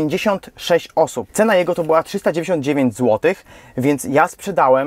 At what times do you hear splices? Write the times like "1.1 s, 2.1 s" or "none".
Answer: 1.2 s